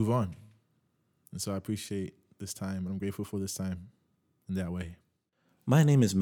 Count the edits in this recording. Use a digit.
0